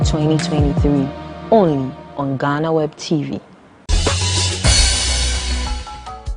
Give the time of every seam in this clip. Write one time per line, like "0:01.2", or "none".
0:03.7
0:05.4